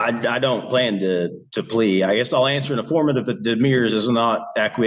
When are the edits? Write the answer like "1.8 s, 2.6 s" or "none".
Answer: none